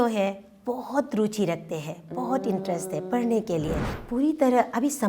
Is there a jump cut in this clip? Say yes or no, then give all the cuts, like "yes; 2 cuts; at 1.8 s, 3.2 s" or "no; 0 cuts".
yes; 1 cut; at 3.9 s